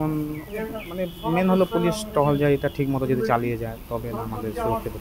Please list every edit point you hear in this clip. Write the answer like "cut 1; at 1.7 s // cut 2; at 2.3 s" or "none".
none

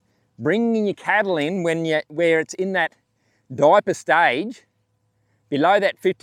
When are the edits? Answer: none

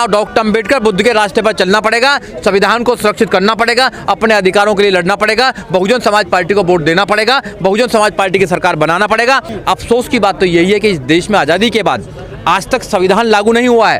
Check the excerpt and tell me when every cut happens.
cut 1; at 9.5 s

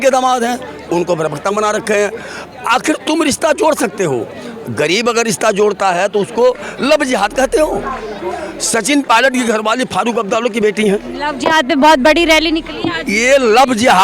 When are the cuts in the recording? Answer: none

